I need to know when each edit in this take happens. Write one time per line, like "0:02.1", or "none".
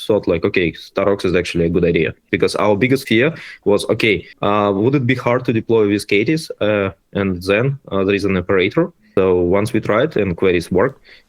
0:02.2
0:03.0
0:04.3
0:09.0

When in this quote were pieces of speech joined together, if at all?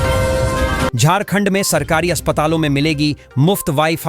0:00.9

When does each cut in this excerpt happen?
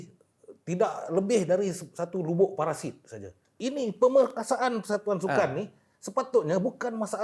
0:03.5

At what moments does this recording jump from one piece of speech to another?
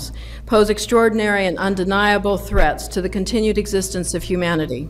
0:01.9

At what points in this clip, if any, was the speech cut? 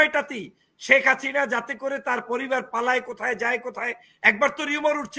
none

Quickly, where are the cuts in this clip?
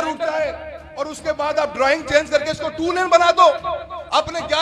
none

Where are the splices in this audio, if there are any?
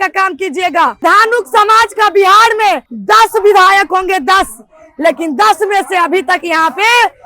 0:01.0
0:02.9

